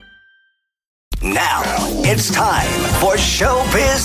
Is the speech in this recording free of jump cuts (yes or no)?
no